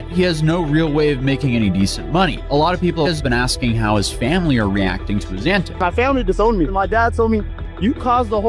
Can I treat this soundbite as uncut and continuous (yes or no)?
no